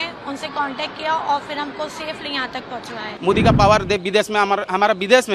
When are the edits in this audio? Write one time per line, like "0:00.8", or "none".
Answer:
0:03.1

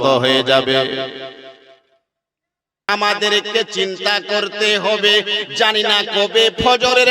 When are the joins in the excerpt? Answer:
0:02.9

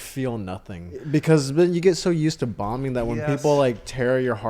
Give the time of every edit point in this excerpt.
0:01.0

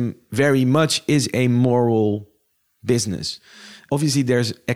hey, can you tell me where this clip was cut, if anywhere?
0:03.8

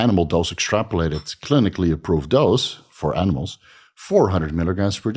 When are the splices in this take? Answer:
none

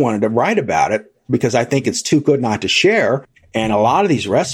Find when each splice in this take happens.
0:03.4

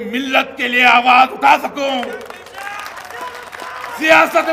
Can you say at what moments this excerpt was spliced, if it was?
none

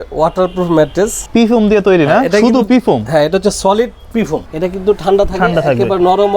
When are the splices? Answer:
0:01.2
0:04.4

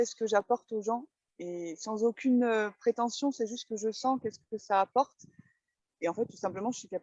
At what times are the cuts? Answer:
none

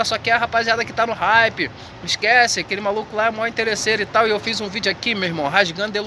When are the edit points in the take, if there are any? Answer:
none

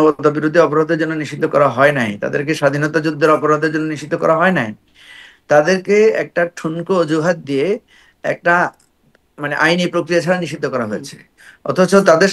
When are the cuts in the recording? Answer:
none

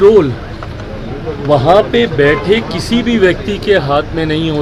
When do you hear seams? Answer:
none

